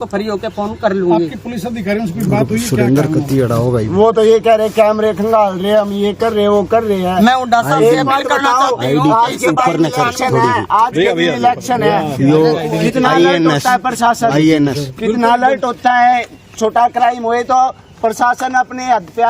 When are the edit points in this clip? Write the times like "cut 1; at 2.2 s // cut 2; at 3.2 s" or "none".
none